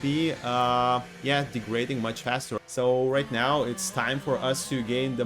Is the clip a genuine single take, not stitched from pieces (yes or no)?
no